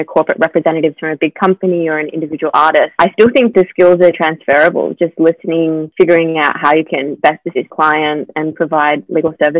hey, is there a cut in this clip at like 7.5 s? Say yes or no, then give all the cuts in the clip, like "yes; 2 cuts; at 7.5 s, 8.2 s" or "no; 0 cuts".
yes; 1 cut; at 7.5 s